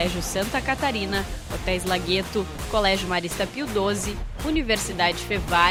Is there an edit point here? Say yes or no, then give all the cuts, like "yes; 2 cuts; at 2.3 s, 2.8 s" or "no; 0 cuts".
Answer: no; 0 cuts